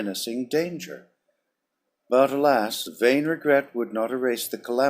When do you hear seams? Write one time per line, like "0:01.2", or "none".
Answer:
0:03.4